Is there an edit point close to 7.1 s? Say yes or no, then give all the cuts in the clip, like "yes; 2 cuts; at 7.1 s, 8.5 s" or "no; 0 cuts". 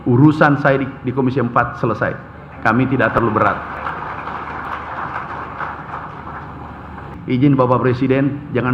yes; 1 cut; at 7.1 s